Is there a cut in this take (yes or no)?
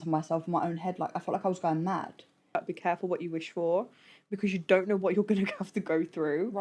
yes